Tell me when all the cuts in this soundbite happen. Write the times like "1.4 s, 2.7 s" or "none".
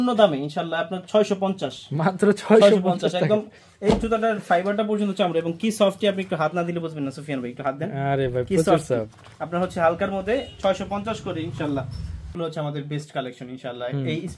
12.3 s